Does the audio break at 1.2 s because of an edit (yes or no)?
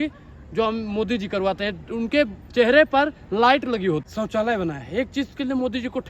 no